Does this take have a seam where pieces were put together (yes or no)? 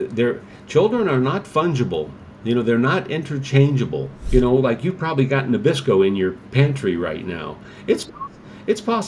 yes